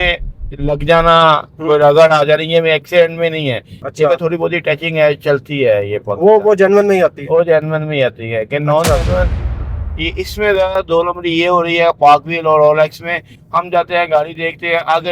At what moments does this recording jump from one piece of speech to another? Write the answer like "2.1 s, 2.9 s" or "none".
9.6 s

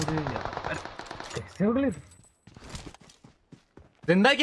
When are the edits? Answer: none

